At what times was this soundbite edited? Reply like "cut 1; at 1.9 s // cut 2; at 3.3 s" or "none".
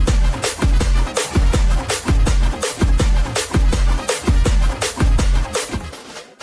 cut 1; at 1.7 s

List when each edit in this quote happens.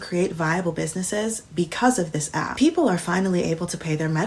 none

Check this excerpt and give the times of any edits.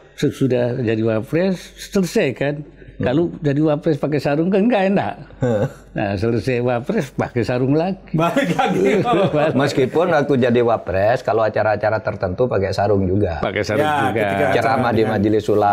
none

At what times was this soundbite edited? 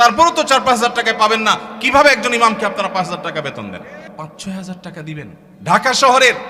cut 1; at 4.1 s // cut 2; at 5.4 s

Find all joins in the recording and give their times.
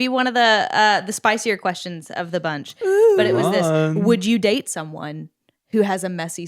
none

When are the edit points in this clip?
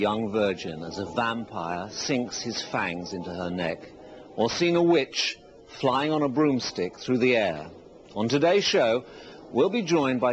none

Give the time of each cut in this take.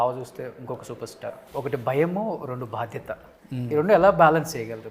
cut 1; at 1.5 s

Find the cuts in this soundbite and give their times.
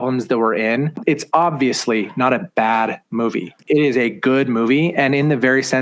cut 1; at 1.0 s // cut 2; at 3.6 s

